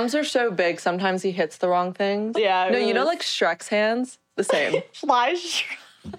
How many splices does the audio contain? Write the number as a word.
two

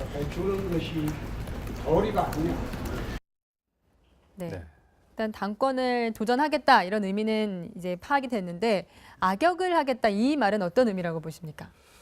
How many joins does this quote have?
one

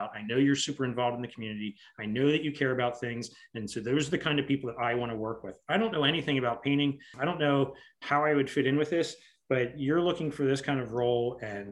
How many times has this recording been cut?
one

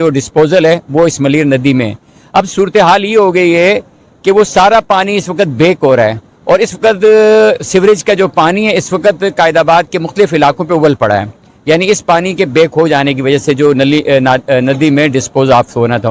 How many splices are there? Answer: zero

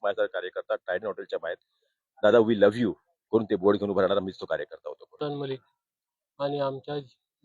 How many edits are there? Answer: one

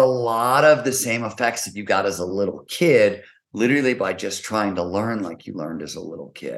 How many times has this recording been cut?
zero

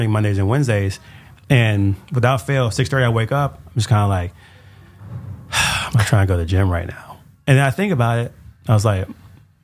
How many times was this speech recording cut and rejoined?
zero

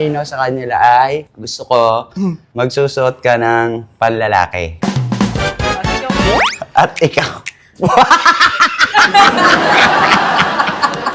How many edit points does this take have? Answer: one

